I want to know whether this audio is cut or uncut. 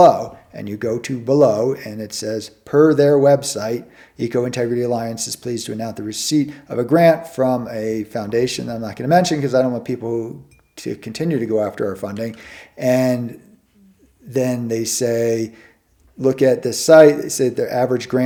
uncut